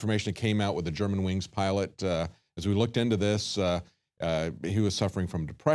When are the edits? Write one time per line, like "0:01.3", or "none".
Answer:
0:03.6

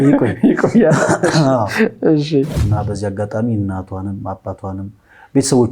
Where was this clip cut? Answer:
0:02.6

